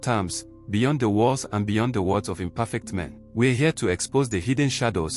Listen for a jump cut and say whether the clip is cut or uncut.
cut